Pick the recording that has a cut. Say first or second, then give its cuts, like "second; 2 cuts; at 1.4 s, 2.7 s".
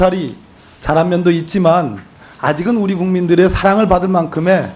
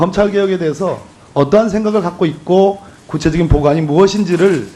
second; 1 cut; at 3.2 s